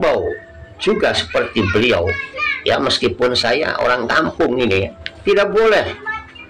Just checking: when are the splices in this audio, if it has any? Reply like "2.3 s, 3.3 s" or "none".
5.0 s